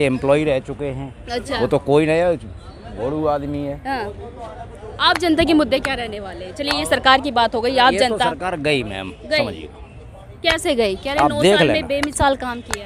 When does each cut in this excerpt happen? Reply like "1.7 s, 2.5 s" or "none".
none

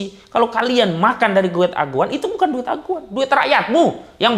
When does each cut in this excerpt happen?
none

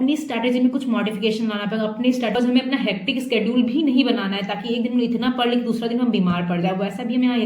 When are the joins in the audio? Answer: 2.4 s

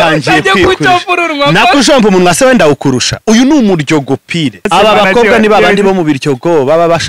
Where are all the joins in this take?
4.6 s

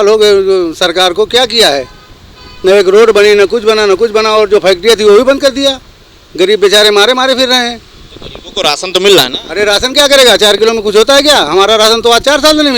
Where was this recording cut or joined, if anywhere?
none

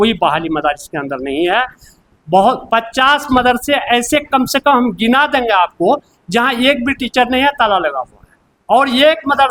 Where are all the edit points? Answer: none

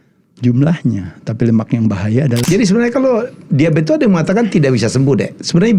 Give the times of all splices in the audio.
2.4 s

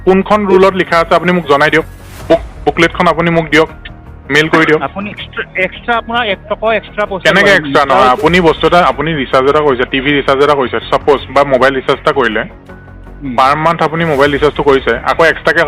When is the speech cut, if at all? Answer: 5.2 s

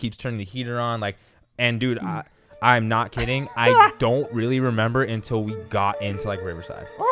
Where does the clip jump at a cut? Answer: none

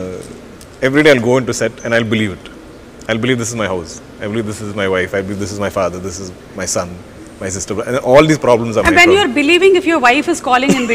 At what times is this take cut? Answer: none

